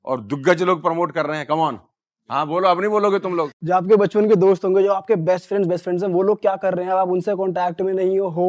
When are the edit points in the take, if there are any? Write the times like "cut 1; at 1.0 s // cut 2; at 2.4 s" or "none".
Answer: cut 1; at 3.5 s